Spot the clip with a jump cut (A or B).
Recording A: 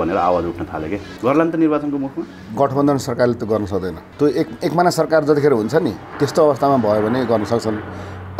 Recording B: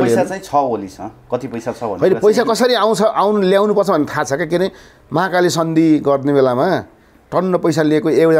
A